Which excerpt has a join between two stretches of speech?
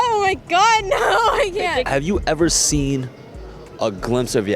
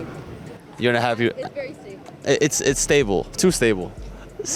first; 1 cut; at 1.9 s

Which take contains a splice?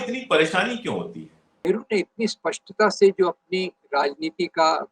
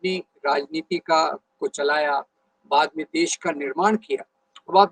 first; 1 cut; at 1.6 s

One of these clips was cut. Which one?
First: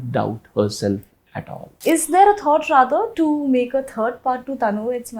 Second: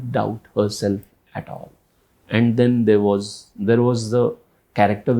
first; 1 cut; at 1.7 s

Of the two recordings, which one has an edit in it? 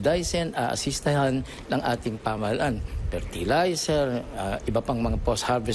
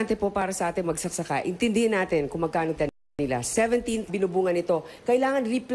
first; 1 cut; at 4.1 s

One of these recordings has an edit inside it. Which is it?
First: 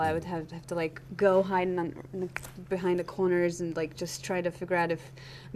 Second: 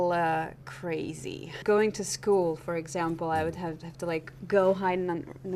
second; 1 cut; at 1.6 s

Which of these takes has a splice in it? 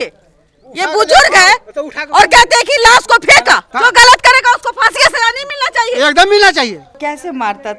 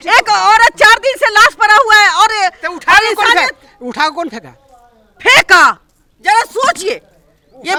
first; 2 cuts; at 3.7 s, 6.9 s

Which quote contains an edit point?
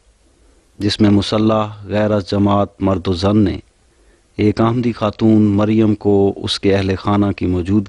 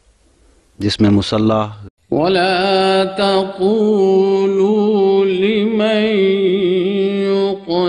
first; 1 cut; at 1.8 s

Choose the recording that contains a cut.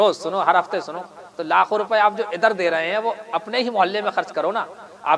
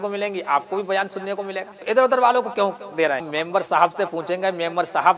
second; 2 cuts; at 1.7 s, 3.3 s

